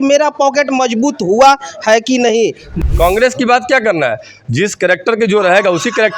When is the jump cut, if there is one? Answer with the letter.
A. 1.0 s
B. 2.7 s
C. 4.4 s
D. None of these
B